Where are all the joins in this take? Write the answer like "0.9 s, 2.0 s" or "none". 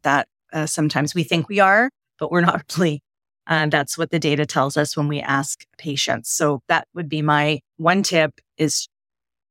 none

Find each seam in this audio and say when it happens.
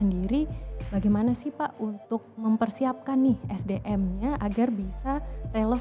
none

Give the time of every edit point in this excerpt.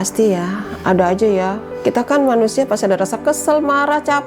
1.7 s

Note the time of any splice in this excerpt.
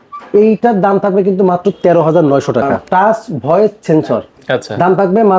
2.8 s

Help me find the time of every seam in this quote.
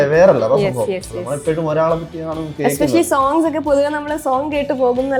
none

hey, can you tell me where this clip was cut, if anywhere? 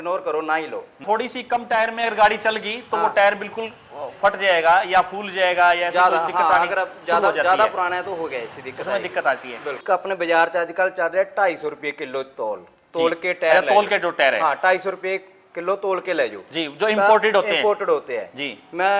1.0 s, 9.8 s

